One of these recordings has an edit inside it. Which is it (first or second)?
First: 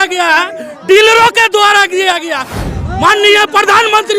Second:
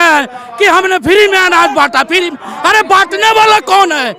first